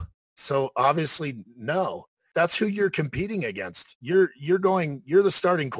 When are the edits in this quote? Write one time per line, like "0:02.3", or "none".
0:02.2